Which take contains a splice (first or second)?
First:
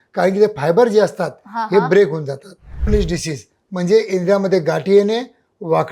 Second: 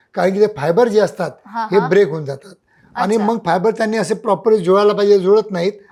first